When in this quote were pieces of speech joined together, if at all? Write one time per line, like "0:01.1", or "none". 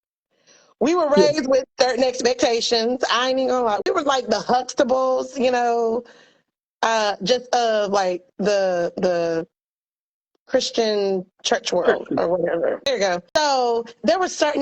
0:03.8
0:12.8